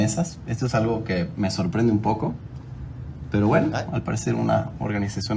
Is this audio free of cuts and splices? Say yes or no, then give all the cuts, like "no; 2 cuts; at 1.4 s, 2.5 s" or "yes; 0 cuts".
yes; 0 cuts